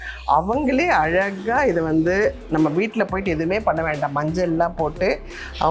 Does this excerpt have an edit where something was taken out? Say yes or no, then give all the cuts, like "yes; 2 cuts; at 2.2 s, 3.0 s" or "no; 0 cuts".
no; 0 cuts